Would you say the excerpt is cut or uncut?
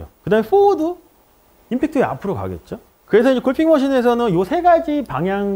uncut